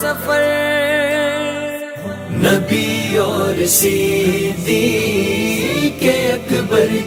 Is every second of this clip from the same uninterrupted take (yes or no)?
yes